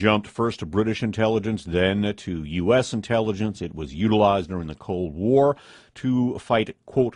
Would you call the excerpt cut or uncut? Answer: uncut